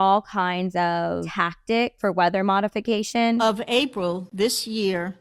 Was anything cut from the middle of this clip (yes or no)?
yes